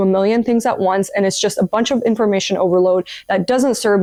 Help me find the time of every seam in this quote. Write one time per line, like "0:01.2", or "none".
none